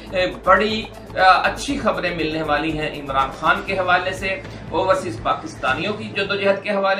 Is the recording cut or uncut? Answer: uncut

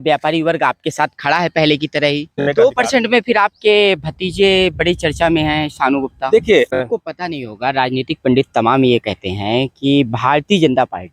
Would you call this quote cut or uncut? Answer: cut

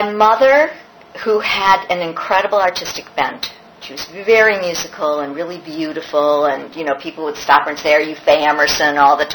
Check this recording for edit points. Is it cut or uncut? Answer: uncut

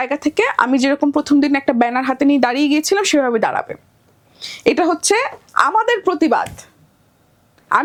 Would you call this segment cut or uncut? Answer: uncut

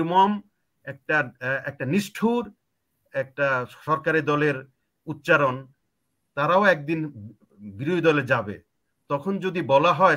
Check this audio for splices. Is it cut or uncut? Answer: uncut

